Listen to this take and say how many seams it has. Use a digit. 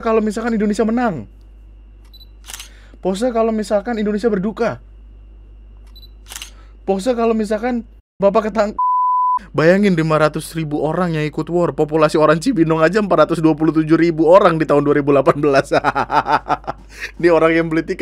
1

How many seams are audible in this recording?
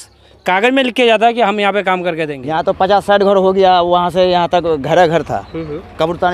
1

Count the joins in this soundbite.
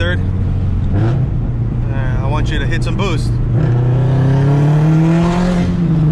0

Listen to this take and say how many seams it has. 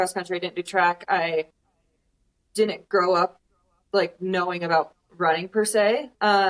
0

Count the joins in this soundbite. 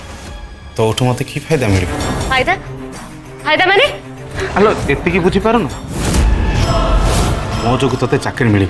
2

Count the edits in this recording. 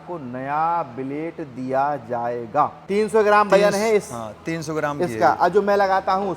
1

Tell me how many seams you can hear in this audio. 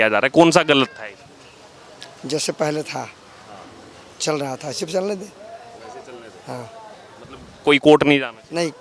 0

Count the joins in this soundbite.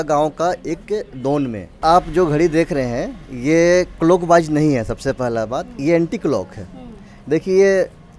1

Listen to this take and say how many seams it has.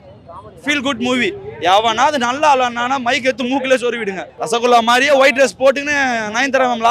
1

